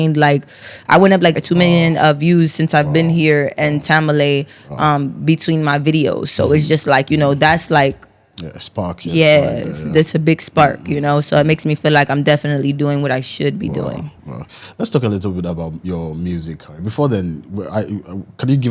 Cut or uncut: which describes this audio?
uncut